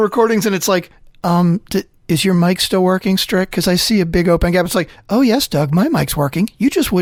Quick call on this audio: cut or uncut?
uncut